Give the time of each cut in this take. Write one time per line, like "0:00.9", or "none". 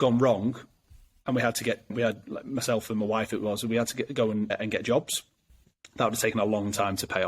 none